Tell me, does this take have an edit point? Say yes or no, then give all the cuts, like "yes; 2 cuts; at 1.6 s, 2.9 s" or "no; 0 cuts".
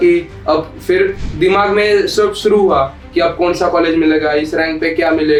no; 0 cuts